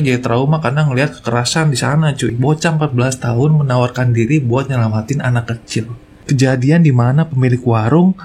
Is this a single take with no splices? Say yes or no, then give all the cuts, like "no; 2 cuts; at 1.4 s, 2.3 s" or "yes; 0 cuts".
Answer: no; 2 cuts; at 2.3 s, 6.1 s